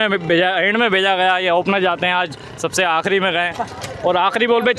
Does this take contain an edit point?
no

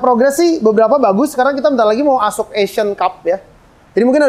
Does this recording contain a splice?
no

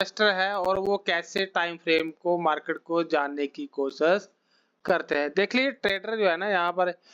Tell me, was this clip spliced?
no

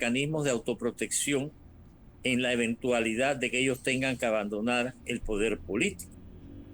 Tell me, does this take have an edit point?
no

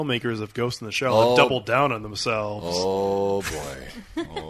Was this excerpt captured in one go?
yes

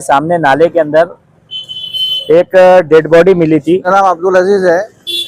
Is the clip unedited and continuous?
no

